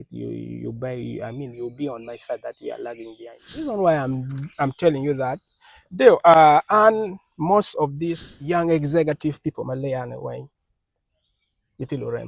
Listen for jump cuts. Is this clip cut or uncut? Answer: cut